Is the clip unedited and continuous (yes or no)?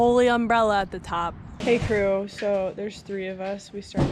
no